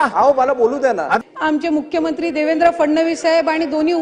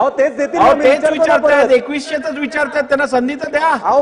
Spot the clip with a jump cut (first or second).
first